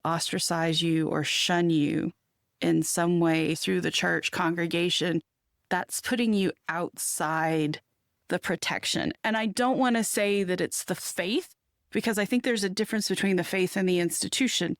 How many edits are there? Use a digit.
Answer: 1